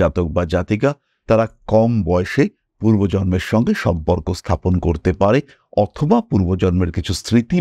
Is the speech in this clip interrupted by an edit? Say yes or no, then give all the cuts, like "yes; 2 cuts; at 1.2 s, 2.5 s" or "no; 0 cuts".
no; 0 cuts